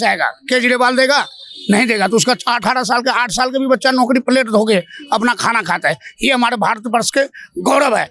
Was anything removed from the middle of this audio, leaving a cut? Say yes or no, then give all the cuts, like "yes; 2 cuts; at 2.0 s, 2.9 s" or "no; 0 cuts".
no; 0 cuts